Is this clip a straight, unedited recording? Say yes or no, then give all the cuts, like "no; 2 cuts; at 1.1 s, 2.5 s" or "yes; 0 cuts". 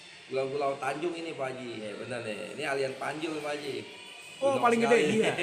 no; 1 cut; at 1.9 s